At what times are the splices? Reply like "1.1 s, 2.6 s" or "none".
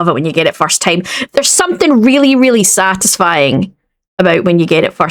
none